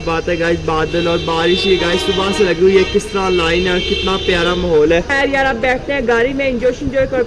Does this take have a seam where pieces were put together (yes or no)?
no